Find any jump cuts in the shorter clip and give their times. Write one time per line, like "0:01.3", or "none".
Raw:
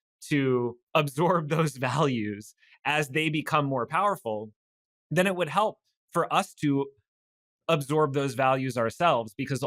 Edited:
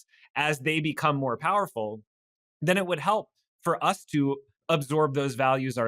0:04.5